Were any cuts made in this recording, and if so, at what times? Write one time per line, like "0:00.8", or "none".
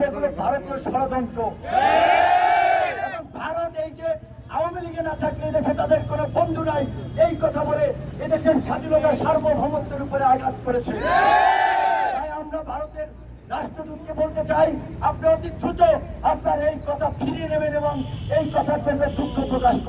none